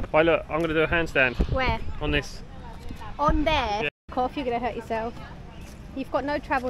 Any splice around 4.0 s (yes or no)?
no